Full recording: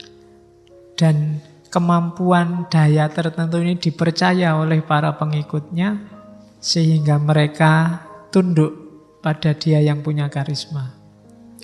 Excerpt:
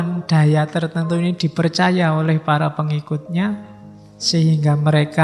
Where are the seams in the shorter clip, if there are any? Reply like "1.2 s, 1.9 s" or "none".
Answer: none